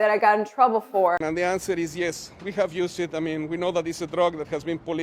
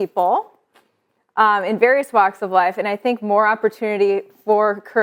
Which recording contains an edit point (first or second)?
first